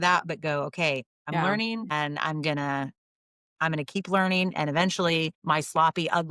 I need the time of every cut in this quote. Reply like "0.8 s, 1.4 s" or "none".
1.1 s, 5.4 s